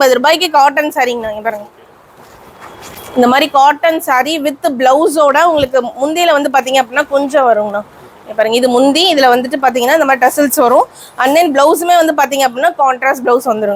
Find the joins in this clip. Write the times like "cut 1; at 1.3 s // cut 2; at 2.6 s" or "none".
none